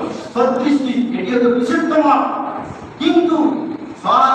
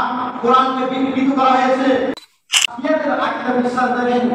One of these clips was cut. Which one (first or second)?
second